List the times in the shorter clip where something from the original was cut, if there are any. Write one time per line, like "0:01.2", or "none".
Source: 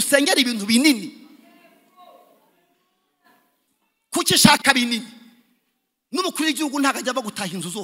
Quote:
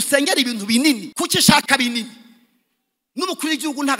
0:01.1